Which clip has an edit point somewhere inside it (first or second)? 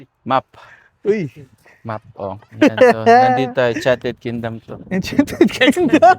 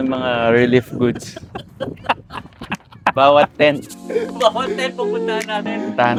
first